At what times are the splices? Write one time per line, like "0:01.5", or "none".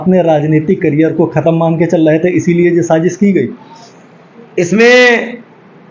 0:03.2